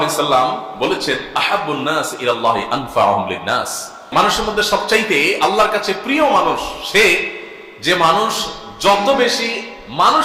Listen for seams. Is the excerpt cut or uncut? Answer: uncut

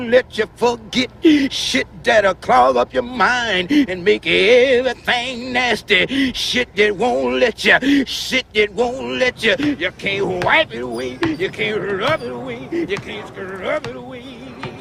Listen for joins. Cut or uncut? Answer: uncut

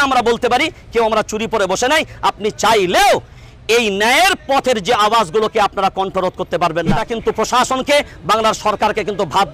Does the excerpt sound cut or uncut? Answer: cut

